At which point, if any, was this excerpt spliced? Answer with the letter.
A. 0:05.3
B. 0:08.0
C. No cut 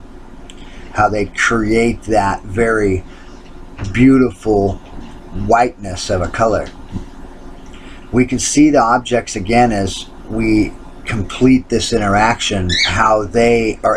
B